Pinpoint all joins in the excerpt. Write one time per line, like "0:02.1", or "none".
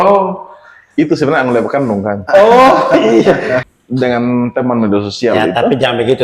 0:03.8